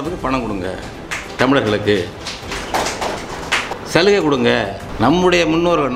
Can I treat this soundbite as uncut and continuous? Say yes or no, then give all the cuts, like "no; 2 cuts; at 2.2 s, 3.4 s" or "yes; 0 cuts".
no; 2 cuts; at 3.7 s, 4.8 s